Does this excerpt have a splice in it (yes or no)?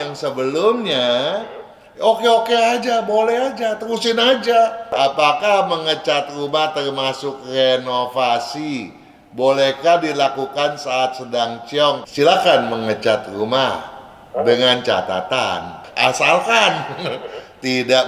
yes